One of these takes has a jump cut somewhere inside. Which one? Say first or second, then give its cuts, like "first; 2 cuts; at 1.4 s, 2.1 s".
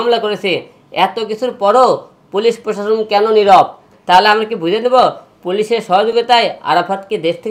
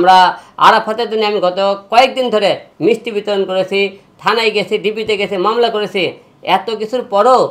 first; 1 cut; at 3.9 s